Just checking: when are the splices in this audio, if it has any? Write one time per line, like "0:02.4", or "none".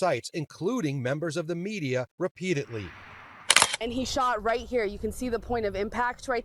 0:03.6